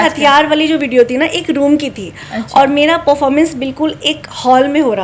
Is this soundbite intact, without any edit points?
yes; 0 cuts

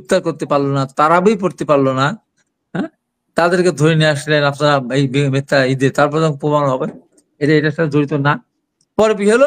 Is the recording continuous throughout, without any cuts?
yes; 0 cuts

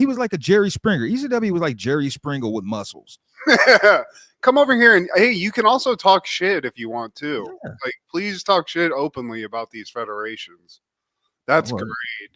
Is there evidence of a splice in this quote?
no; 0 cuts

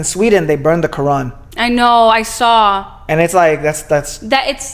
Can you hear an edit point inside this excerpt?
no; 0 cuts

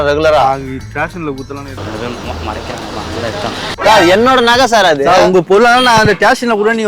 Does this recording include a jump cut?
yes; 1 cut; at 3.8 s

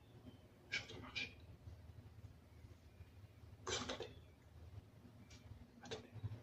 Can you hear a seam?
no; 0 cuts

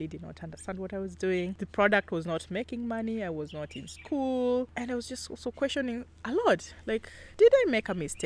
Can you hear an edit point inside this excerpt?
no; 0 cuts

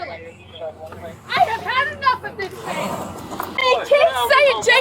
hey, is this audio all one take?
no; 1 cut; at 3.6 s

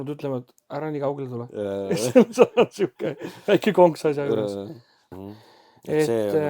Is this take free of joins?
no; 1 cut; at 5.1 s

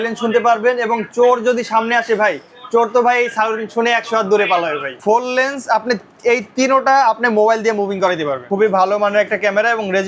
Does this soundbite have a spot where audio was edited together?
yes; 2 cuts; at 4.9 s, 8.4 s

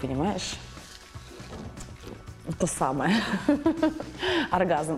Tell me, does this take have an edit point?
no; 0 cuts

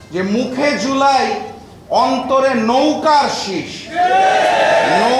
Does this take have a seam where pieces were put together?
no; 0 cuts

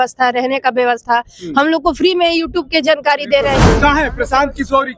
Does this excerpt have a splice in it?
yes; 1 cut; at 3.7 s

